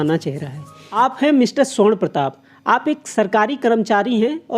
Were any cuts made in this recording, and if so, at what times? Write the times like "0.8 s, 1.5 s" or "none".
1.0 s

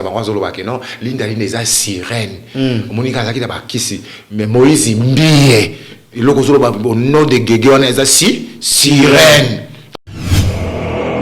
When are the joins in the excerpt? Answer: 10.0 s

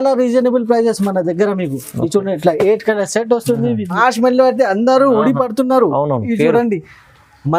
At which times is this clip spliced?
4.0 s

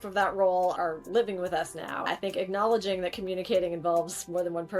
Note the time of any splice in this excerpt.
2.0 s

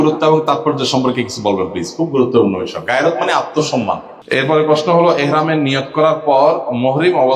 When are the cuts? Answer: 4.1 s

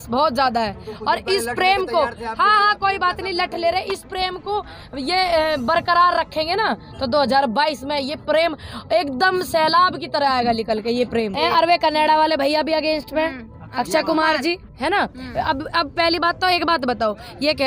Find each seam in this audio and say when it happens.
11.3 s

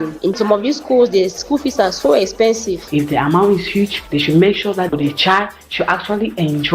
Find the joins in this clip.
2.9 s, 4.9 s

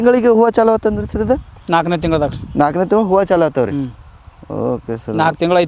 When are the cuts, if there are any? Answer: none

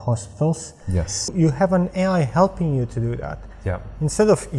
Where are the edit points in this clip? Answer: 1.3 s

